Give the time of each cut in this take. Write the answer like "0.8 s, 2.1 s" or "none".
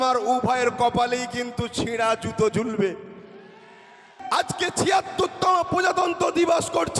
4.2 s

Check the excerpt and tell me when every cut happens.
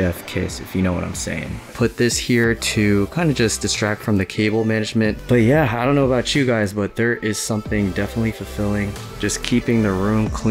1.6 s, 5.2 s

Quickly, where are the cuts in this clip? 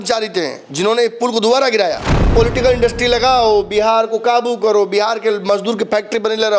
2.1 s

